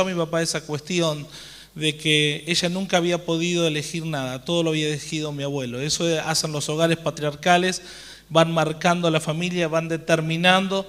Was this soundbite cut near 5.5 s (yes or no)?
no